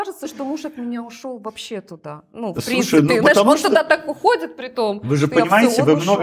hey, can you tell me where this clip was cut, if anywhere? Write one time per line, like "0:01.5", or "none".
none